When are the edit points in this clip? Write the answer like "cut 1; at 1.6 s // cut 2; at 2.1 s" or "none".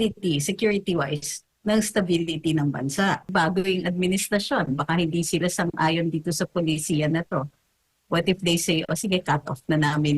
cut 1; at 3.3 s